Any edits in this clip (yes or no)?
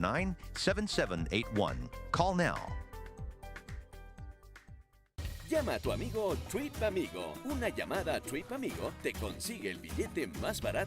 yes